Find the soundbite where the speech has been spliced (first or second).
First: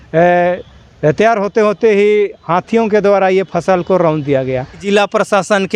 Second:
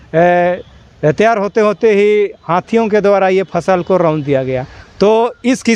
first